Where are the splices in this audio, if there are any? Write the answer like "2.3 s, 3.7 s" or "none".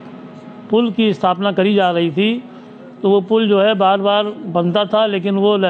none